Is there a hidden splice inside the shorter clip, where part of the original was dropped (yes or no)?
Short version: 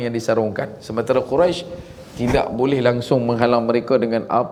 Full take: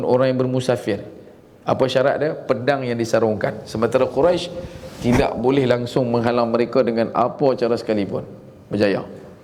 no